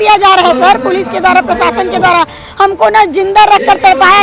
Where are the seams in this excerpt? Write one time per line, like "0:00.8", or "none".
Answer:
none